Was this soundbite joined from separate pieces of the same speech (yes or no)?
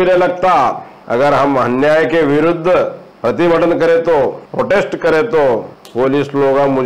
yes